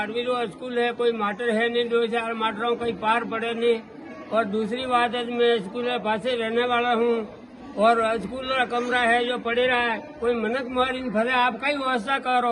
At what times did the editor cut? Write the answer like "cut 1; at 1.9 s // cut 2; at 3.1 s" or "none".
none